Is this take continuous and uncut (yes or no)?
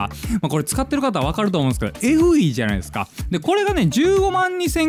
no